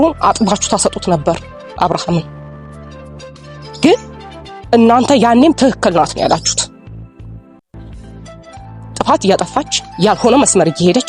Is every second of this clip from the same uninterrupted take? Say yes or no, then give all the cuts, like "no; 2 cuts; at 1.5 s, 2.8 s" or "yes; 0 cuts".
yes; 0 cuts